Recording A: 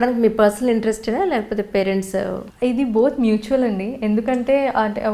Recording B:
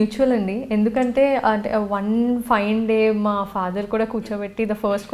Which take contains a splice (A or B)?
A